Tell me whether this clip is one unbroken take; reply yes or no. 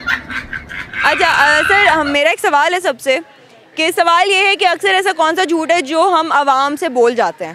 yes